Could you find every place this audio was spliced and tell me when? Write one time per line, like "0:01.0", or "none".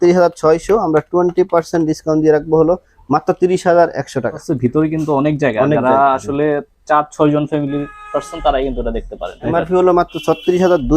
0:04.4
0:09.5